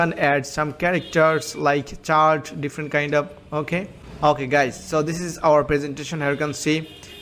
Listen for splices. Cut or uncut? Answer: uncut